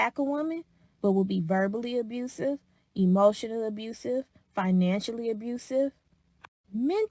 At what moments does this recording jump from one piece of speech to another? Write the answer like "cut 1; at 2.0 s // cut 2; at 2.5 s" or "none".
none